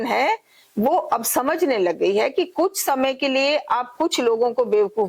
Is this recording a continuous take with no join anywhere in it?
yes; 0 cuts

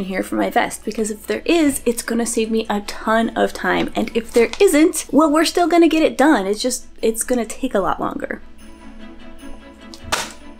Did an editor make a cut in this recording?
no; 0 cuts

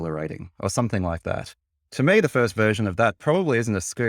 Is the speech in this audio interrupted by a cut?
yes; 1 cut; at 1.8 s

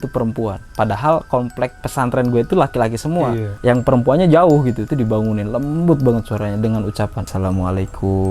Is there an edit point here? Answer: yes; 4 cuts; at 1.8 s, 3.5 s, 4.8 s, 7.2 s

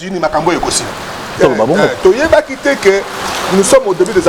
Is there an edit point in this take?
yes; 1 cut; at 1.4 s

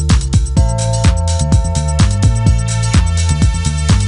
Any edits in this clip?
no; 0 cuts

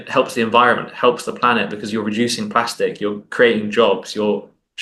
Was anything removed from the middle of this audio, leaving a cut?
no; 0 cuts

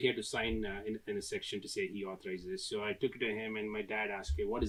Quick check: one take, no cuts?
yes; 0 cuts

